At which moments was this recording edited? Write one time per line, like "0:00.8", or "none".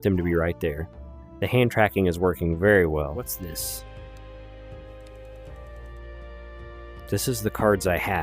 0:03.4